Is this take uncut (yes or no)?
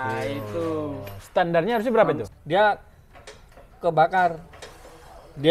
no